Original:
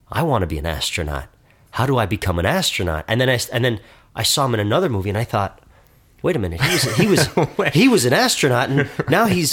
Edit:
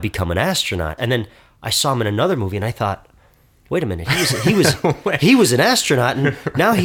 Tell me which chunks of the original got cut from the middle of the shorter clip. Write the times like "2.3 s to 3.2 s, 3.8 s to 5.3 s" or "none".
3.0 s to 3.5 s